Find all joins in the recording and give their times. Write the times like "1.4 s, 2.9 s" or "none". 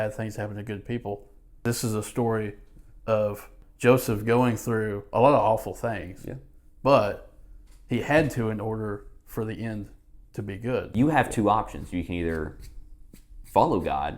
1.6 s, 3.6 s, 10.9 s